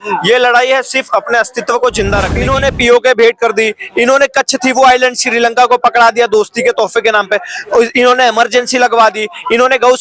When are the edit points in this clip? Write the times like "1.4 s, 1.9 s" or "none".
2.4 s